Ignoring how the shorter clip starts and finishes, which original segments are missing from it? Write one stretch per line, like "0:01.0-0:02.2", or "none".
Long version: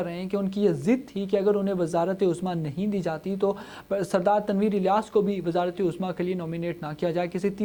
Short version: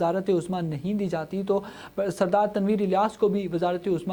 none